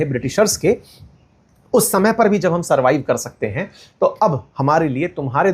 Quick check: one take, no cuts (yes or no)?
yes